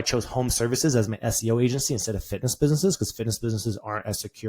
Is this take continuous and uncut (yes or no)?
yes